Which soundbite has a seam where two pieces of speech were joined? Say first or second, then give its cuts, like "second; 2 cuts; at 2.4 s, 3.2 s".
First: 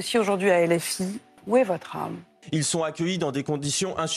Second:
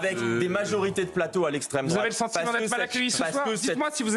first; 2 cuts; at 1.3 s, 2.4 s